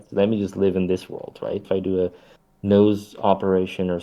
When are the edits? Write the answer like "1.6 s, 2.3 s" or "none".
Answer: 1.6 s